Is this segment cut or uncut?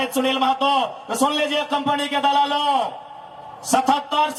uncut